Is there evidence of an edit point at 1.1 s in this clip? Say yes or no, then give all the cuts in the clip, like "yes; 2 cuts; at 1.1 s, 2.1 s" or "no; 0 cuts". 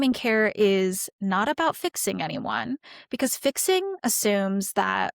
yes; 1 cut; at 1.1 s